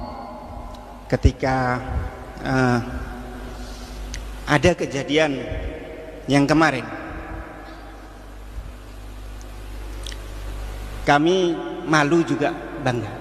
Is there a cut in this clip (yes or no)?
yes